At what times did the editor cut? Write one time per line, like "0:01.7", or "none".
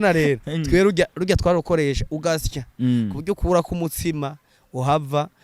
none

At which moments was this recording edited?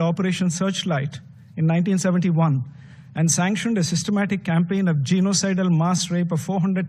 none

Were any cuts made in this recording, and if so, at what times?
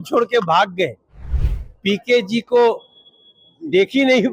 0:01.3

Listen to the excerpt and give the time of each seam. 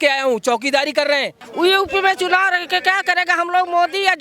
0:01.4

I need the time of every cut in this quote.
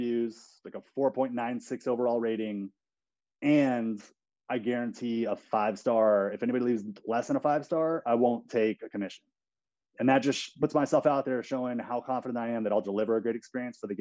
0:10.6

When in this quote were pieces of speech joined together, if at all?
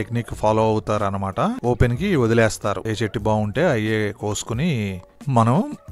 0:01.6
0:02.8

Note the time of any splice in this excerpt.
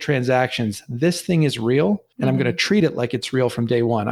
0:02.1

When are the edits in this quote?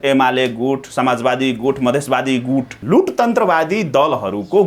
0:02.8

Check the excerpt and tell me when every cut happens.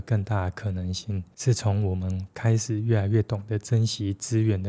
none

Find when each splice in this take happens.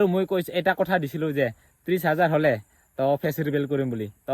none

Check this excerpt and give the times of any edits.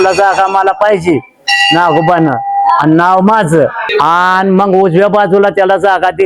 none

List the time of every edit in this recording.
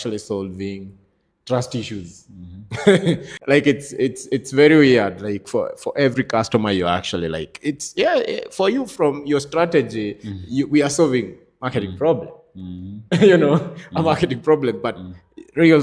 0:03.3

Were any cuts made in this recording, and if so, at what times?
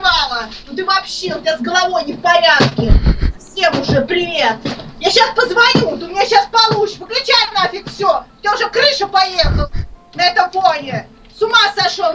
none

